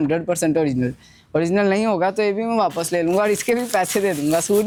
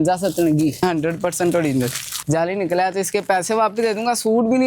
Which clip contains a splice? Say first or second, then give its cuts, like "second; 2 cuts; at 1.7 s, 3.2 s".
second; 2 cuts; at 0.8 s, 2.1 s